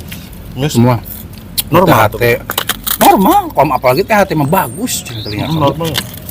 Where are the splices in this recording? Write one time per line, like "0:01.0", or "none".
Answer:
none